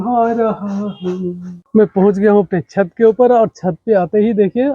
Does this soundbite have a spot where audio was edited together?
yes; 1 cut; at 1.6 s

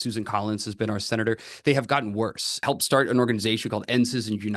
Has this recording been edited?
yes; 1 cut; at 2.5 s

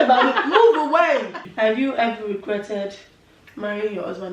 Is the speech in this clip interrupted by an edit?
yes; 1 cut; at 1.4 s

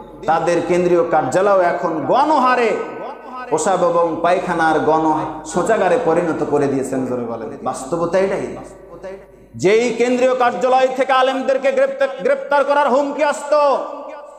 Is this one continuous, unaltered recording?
no; 1 cut; at 7.4 s

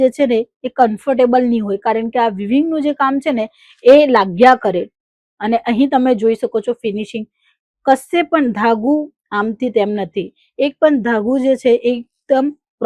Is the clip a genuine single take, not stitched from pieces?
yes; 0 cuts

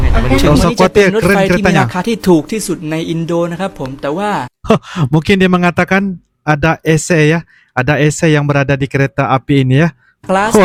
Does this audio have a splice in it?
no; 0 cuts

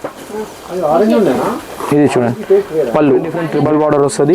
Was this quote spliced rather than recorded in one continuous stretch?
yes; 1 cut; at 3.4 s

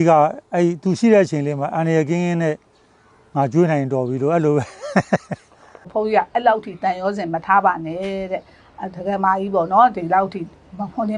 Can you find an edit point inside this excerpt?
yes; 1 cut; at 5.9 s

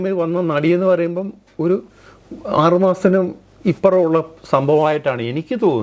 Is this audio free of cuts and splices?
yes; 0 cuts

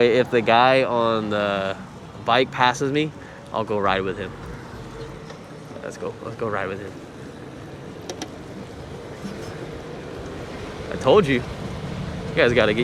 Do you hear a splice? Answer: no; 0 cuts

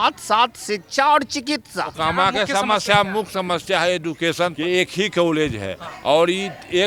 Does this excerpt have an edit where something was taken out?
yes; 2 cuts; at 1.9 s, 4.5 s

